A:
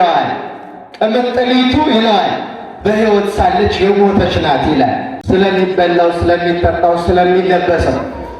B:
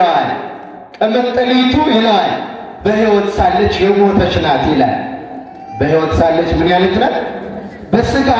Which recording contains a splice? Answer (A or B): A